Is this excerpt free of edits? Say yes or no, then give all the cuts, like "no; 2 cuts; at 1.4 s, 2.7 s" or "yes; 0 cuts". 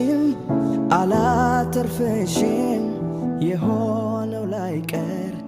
yes; 0 cuts